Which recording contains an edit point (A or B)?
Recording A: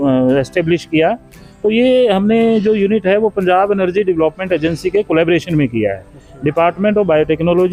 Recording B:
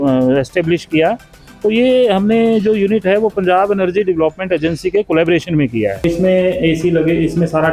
B